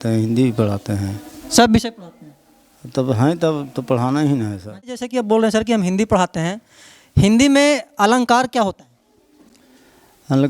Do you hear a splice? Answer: yes; 1 cut; at 4.9 s

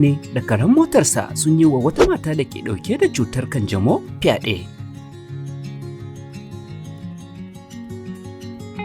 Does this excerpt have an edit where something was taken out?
yes; 1 cut; at 5.1 s

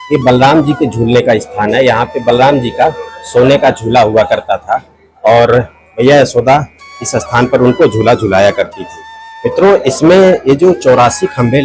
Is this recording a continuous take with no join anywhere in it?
yes; 0 cuts

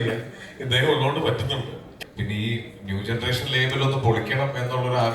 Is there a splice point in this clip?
yes; 1 cut; at 2.0 s

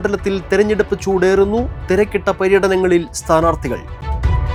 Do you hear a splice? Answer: no; 0 cuts

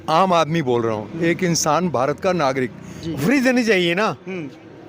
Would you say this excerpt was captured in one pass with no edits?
no; 1 cut; at 3.2 s

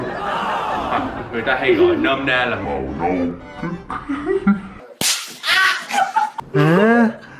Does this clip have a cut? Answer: yes; 2 cuts; at 0.9 s, 6.4 s

